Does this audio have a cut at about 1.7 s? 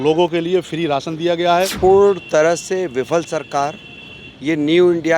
yes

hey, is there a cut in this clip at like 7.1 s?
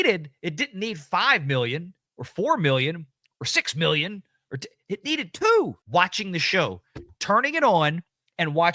no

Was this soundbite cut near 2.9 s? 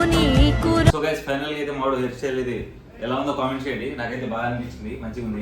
no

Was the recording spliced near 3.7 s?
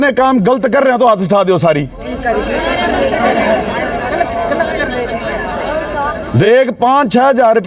no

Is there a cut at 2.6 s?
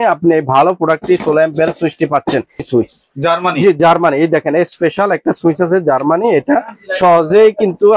yes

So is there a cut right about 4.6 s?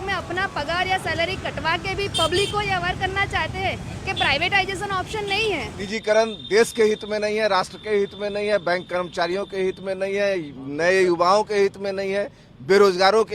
no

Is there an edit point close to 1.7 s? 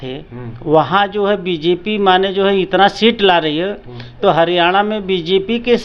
no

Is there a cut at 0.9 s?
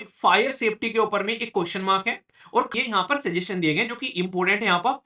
no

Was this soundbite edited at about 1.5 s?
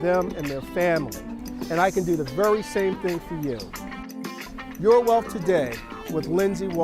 no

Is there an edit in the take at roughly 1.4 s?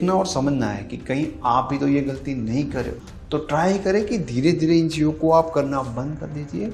no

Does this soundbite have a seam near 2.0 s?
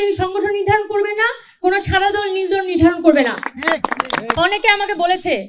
no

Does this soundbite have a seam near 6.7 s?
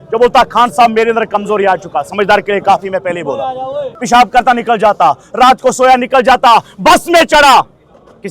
no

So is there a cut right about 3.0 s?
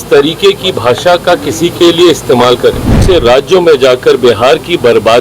yes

